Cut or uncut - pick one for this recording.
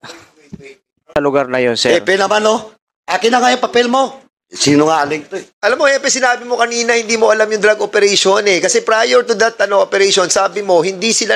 cut